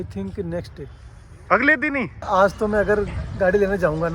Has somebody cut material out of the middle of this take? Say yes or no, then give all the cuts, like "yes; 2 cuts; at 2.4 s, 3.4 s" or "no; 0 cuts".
yes; 1 cut; at 2.2 s